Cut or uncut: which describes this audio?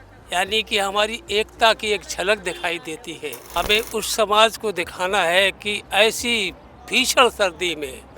cut